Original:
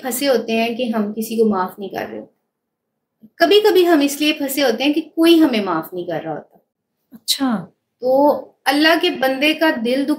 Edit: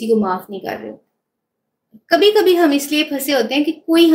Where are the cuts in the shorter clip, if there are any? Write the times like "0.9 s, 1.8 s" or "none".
none